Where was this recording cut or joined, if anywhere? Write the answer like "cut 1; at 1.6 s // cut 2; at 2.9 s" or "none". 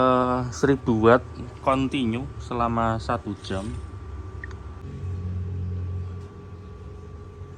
cut 1; at 4.8 s